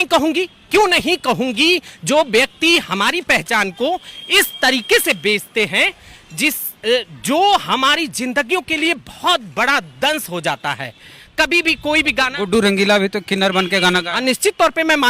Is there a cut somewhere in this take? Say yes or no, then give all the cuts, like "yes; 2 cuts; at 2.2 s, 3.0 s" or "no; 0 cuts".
no; 0 cuts